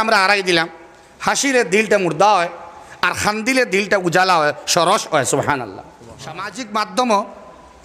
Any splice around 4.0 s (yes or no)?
no